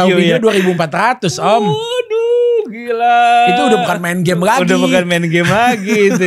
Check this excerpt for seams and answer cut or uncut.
uncut